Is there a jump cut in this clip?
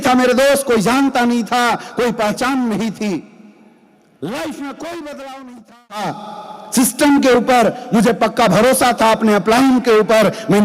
yes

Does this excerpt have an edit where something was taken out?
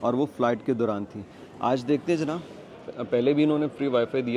no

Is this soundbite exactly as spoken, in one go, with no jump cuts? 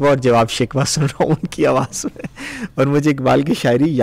yes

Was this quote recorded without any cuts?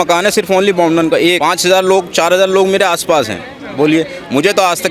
no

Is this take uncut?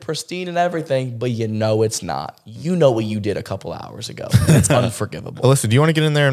yes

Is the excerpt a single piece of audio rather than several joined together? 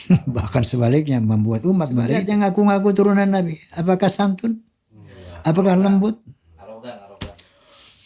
no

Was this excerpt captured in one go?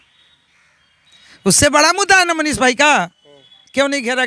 yes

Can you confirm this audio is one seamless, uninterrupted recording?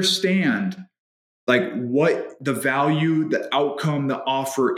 yes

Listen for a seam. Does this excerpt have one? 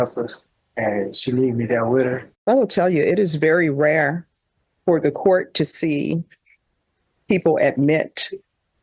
yes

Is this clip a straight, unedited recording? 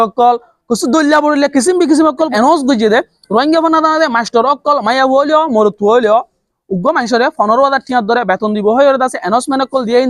no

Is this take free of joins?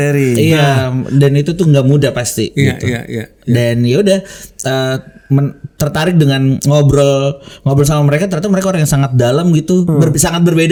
yes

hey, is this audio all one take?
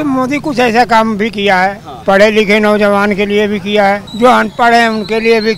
no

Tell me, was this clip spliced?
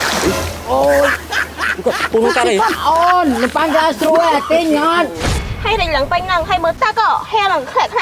yes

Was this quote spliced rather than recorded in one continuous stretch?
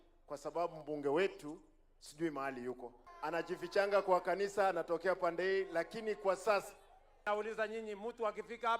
yes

